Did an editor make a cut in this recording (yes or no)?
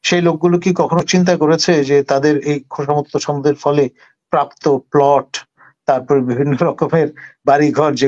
no